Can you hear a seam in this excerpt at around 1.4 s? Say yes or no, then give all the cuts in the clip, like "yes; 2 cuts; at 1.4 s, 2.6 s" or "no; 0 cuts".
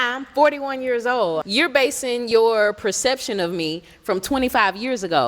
yes; 1 cut; at 1.4 s